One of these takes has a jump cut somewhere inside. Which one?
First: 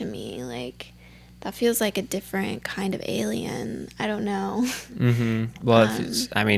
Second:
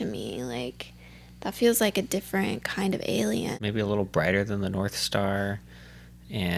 second; 1 cut; at 3.5 s

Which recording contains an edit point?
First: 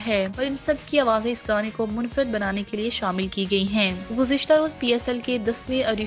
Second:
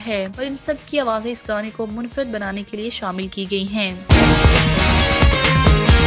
second; 1 cut; at 4.0 s

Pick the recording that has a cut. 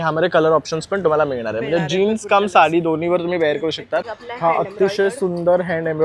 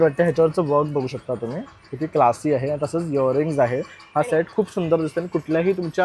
first; 1 cut; at 4.2 s

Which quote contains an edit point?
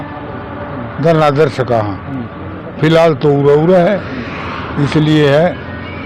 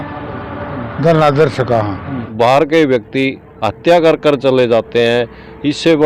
second; 1 cut; at 2.2 s

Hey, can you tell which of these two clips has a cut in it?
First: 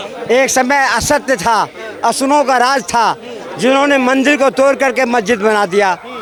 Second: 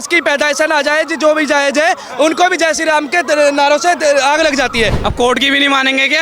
second; 1 cut; at 5.0 s

